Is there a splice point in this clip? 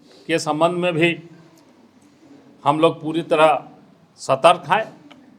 no; 0 cuts

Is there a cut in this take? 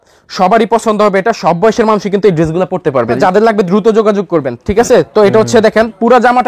yes; 1 cut; at 3.2 s

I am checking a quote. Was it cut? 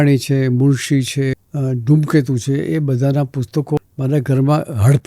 yes; 2 cuts; at 1.4 s, 3.8 s

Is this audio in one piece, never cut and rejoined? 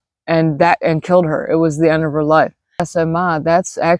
no; 1 cut; at 2.9 s

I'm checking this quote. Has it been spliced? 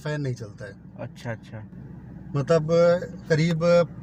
no; 0 cuts

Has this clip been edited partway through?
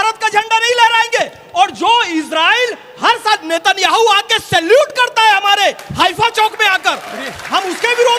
no; 0 cuts

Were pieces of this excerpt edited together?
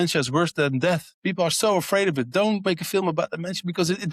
yes; 2 cuts; at 1.1 s, 2.7 s

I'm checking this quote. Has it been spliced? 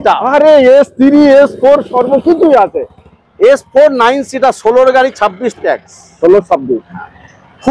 no; 0 cuts

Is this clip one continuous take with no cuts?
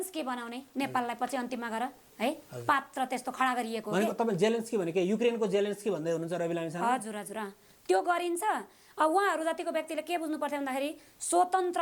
yes; 0 cuts

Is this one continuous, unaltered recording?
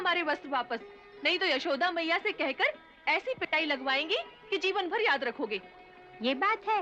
yes; 0 cuts

